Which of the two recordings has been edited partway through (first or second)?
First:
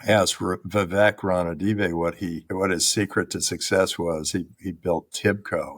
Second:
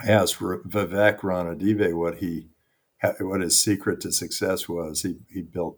first